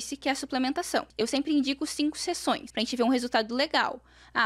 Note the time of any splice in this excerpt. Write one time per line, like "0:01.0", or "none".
0:01.1
0:02.7